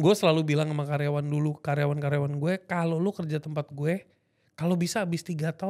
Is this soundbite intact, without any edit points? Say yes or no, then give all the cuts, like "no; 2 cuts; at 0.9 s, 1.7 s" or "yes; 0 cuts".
yes; 0 cuts